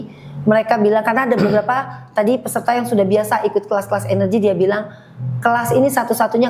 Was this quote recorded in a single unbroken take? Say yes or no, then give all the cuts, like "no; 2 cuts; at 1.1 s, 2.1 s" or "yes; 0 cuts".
yes; 0 cuts